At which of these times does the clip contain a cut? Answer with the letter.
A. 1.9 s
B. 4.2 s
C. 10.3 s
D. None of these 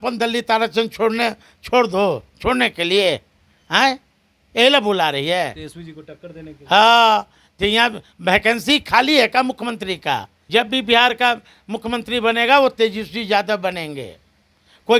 C